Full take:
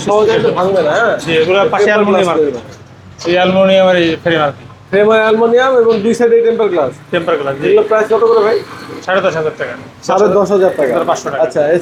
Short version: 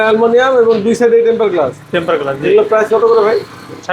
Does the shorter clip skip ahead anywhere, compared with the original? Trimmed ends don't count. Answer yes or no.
no